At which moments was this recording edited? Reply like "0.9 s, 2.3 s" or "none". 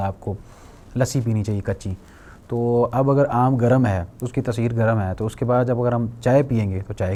none